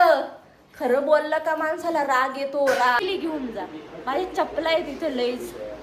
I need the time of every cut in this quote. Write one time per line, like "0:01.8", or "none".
0:03.0